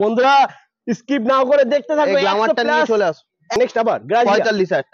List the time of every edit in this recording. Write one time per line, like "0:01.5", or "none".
0:03.6